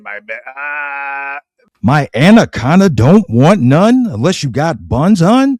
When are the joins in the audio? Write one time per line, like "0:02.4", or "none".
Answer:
0:01.7